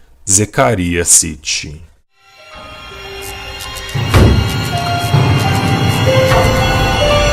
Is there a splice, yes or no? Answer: no